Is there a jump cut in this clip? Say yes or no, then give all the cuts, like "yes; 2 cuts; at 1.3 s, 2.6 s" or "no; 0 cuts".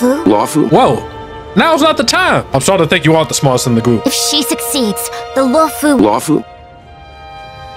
no; 0 cuts